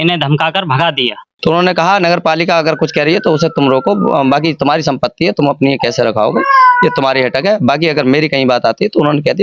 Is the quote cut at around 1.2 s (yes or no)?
yes